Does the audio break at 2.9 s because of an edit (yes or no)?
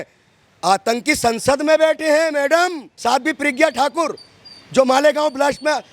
yes